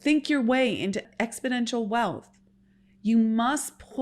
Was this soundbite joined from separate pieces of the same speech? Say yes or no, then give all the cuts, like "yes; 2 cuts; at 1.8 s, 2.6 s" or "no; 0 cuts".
yes; 1 cut; at 1.0 s